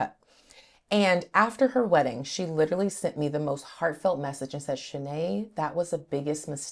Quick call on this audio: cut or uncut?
uncut